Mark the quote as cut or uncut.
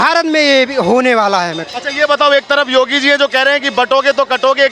uncut